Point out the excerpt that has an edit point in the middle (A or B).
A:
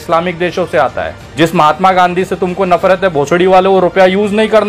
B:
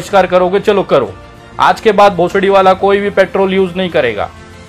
A